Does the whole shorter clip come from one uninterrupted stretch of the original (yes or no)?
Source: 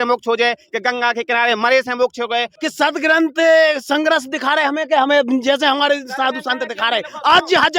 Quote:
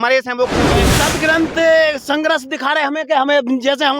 no